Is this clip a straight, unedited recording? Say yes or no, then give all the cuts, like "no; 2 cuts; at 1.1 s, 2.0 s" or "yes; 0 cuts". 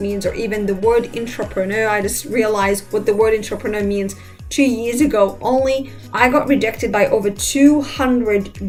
yes; 0 cuts